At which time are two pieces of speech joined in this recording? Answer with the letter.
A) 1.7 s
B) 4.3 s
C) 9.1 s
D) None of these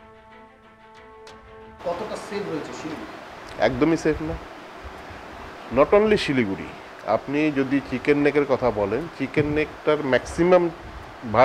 A